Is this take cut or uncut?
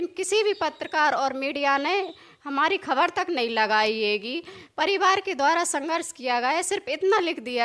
uncut